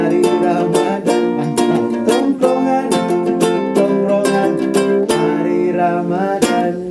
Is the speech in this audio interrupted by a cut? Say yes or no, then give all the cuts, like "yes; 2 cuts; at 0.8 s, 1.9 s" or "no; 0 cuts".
no; 0 cuts